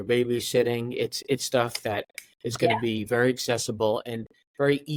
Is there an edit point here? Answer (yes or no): no